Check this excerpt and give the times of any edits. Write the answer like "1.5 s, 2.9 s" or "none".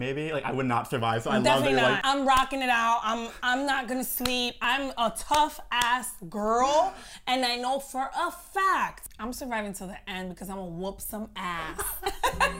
2.0 s, 4.6 s, 9.1 s